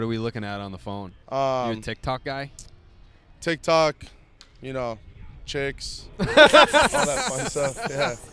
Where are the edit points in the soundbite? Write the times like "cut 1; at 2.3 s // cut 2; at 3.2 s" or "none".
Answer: cut 1; at 1.2 s